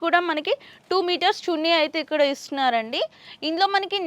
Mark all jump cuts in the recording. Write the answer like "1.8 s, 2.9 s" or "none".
none